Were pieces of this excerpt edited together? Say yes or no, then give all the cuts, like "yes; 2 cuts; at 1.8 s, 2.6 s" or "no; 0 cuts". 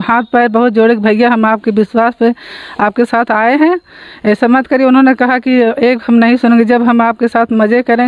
no; 0 cuts